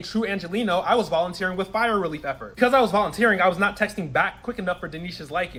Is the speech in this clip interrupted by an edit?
no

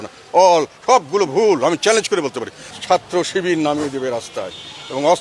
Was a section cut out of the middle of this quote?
yes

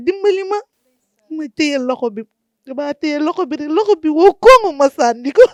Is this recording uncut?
yes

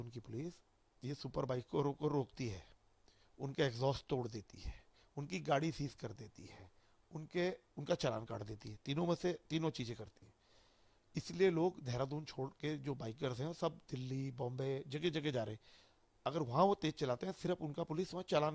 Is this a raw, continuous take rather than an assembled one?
yes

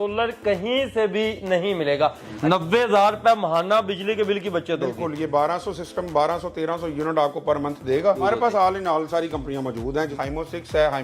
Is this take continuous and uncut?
no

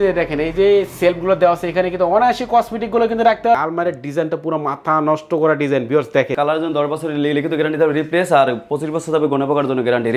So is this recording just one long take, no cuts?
no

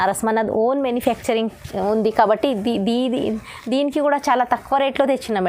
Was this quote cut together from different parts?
no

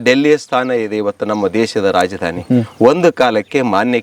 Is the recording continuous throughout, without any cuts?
yes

